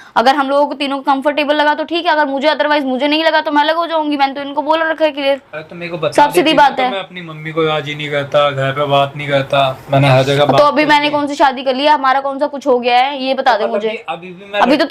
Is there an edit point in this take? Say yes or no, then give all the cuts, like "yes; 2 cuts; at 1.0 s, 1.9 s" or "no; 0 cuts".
no; 0 cuts